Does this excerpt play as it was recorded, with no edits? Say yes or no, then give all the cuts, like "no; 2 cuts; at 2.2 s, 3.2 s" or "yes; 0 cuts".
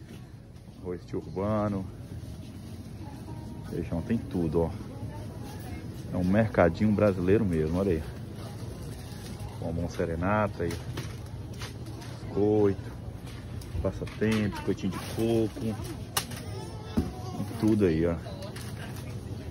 yes; 0 cuts